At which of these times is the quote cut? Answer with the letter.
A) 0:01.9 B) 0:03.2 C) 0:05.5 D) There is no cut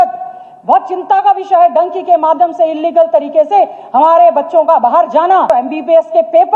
C